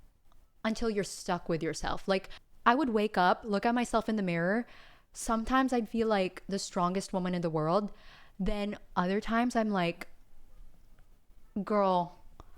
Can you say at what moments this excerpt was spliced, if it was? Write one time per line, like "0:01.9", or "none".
0:02.4